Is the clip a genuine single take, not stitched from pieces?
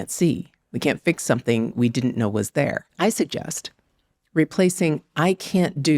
no; 1 cut; at 2.8 s

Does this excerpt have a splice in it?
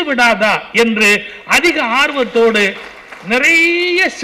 no; 0 cuts

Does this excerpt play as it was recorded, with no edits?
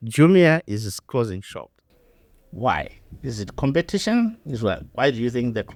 yes; 0 cuts

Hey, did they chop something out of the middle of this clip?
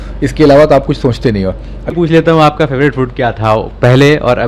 yes; 1 cut; at 1.9 s

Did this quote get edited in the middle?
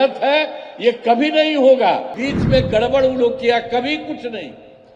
yes; 1 cut; at 2.2 s

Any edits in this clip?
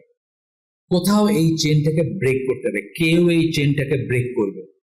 no; 0 cuts

